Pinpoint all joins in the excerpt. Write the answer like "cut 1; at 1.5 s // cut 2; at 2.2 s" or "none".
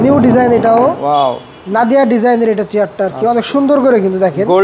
none